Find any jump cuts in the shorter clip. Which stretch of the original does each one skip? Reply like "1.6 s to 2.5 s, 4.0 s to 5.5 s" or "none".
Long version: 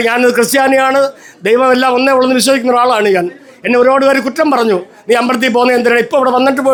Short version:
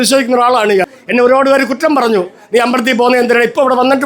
3.3 s to 3.5 s